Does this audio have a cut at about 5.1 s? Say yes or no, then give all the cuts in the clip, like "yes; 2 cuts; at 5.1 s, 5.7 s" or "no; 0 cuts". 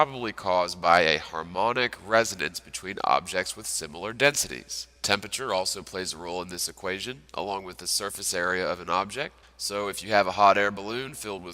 no; 1 cut; at 10.0 s